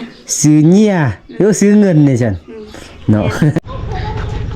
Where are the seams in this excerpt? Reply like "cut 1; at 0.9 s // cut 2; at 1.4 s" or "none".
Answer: cut 1; at 3.6 s